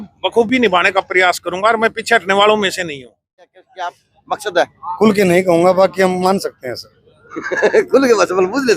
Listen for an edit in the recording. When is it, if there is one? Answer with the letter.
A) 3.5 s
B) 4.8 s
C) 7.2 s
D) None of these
A